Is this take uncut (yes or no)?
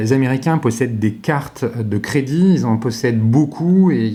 yes